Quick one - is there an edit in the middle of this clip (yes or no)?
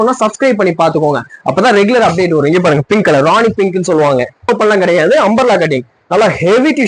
yes